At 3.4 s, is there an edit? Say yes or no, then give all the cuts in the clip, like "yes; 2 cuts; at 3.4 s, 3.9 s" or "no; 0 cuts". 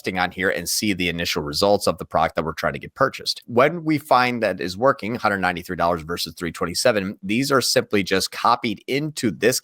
yes; 1 cut; at 3.4 s